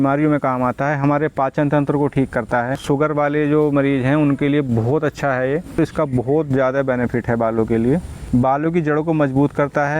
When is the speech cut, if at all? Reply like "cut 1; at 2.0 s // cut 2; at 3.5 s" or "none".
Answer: cut 1; at 2.8 s // cut 2; at 5.7 s // cut 3; at 8.1 s